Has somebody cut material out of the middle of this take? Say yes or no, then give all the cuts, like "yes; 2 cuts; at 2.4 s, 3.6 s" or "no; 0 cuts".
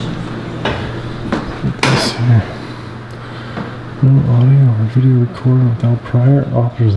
no; 0 cuts